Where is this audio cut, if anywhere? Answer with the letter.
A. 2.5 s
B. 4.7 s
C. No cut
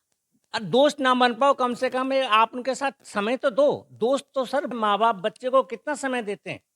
B